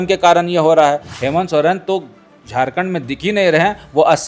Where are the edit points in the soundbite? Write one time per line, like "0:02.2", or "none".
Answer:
0:01.1